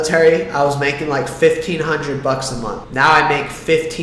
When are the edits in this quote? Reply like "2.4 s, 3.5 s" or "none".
2.8 s